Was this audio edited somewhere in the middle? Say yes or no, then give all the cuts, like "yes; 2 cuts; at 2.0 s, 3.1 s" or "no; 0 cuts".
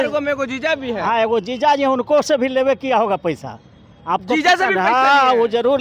no; 0 cuts